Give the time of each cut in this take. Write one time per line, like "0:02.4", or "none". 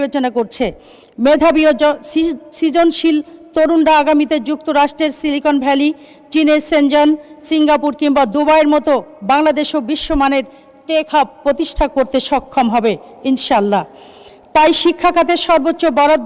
none